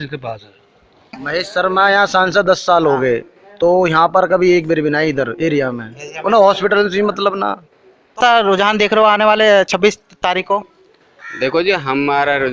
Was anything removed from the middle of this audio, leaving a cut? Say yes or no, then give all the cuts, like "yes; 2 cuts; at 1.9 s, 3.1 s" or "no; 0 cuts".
yes; 2 cuts; at 1.2 s, 8.1 s